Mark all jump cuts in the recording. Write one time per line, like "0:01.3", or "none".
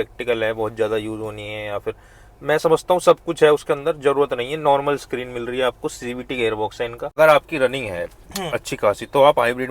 0:07.0